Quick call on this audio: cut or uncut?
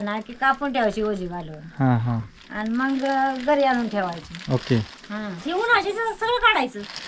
uncut